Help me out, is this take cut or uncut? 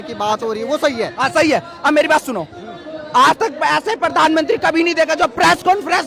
uncut